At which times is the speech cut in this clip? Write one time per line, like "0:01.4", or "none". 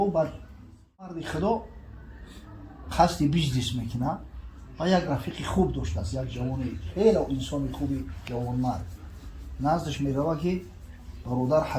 0:01.2